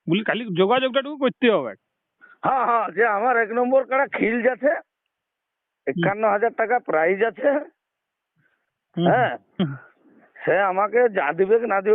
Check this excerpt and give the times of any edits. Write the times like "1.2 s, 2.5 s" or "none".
none